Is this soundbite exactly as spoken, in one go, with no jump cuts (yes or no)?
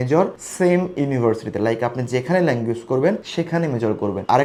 yes